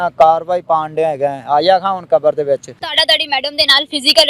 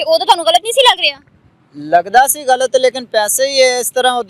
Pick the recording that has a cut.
first; 1 cut; at 2.8 s

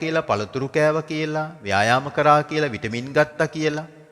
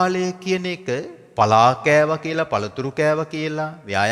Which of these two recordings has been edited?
second; 1 cut; at 1.2 s

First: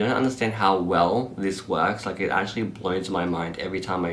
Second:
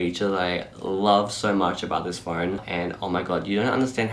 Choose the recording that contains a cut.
second; 1 cut; at 2.6 s

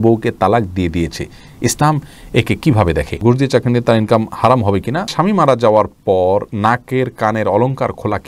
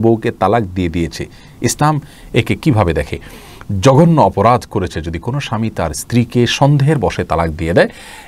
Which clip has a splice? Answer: first; 3 cuts; at 3.1 s, 5.1 s, 6.5 s

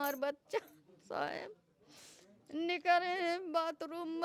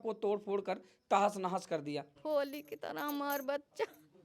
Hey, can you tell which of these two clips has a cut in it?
second; 1 cut; at 2.1 s

